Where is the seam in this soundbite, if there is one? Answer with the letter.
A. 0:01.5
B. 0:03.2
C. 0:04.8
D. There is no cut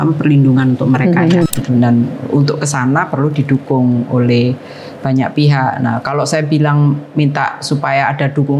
A